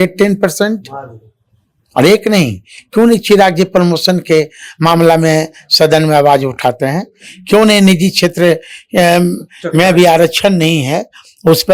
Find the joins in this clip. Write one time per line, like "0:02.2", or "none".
none